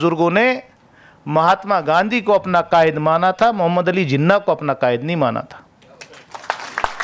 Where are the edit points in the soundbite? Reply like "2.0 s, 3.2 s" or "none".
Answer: none